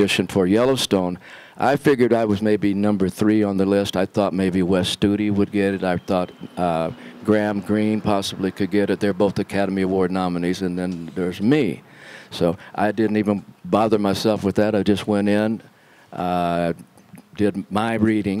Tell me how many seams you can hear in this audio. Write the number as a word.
zero